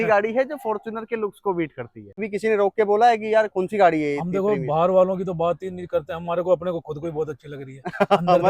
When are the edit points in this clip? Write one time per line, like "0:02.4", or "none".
0:02.3